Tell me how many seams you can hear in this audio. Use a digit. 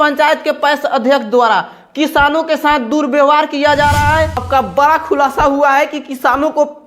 1